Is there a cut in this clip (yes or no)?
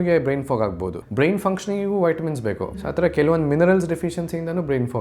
yes